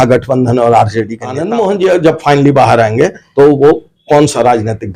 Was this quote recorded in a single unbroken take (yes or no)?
no